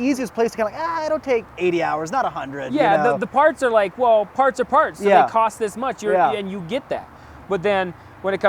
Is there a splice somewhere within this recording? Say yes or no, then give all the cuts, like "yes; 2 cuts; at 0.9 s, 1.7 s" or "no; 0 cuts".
yes; 1 cut; at 1.5 s